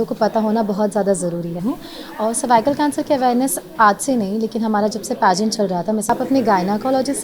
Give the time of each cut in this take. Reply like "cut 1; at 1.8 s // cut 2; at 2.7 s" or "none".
cut 1; at 1.6 s // cut 2; at 6.1 s